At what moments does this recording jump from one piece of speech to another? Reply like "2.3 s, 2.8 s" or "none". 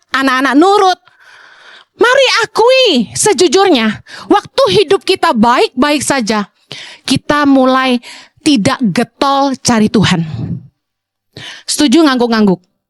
none